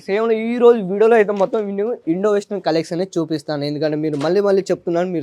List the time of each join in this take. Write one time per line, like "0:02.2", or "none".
none